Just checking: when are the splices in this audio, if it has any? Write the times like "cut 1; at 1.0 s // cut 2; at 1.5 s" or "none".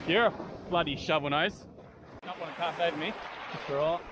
none